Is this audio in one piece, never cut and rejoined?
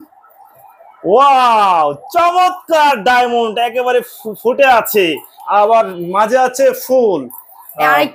yes; 0 cuts

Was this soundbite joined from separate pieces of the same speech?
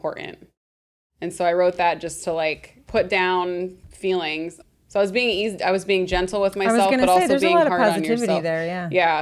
yes; 2 cuts; at 2.7 s, 4.3 s

